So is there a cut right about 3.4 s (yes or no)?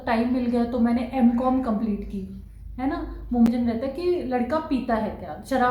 yes